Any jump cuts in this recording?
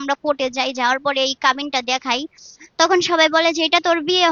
no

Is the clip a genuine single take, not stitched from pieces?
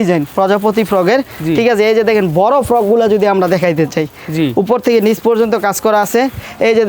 yes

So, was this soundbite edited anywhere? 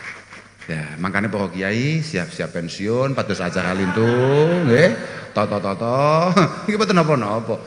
no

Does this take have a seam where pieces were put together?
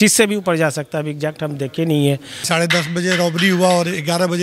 yes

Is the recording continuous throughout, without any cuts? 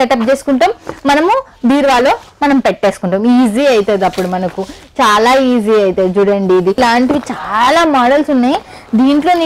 no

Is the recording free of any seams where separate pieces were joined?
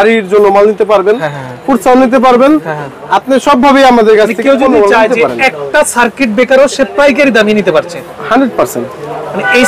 yes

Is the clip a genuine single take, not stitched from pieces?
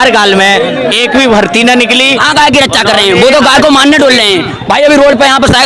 no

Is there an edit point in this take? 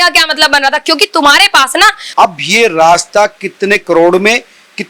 yes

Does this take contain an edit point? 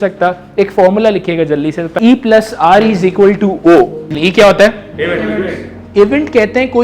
yes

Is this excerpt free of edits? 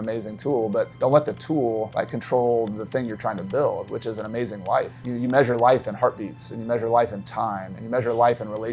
no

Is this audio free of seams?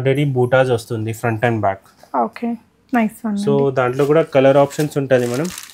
yes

